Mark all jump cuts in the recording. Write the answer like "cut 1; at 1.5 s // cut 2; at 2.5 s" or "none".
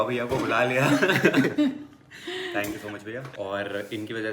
cut 1; at 3.3 s